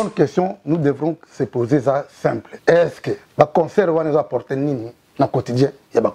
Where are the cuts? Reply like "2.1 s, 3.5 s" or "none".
2.5 s, 3.2 s